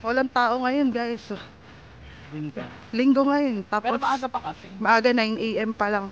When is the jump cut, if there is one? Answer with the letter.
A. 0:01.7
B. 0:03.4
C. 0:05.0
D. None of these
D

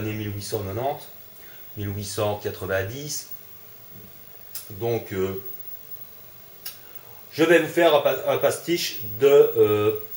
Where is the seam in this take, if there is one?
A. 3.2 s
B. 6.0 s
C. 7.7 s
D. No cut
C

